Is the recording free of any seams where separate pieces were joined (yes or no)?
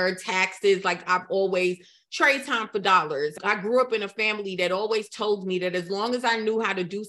no